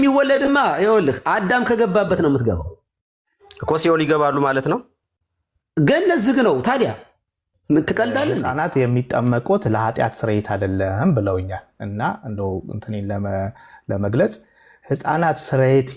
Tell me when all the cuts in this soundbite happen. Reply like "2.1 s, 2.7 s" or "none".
8.4 s